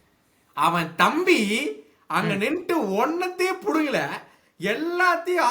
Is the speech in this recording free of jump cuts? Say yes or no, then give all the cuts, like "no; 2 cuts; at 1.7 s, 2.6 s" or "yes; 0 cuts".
yes; 0 cuts